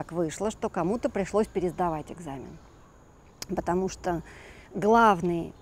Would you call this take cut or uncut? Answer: uncut